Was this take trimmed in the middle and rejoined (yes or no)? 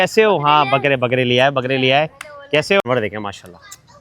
yes